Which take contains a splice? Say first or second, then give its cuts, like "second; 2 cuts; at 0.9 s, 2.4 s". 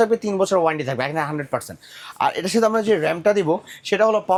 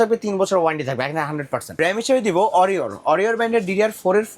second; 1 cut; at 1.7 s